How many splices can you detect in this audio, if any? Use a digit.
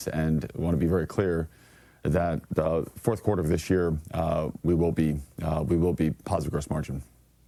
0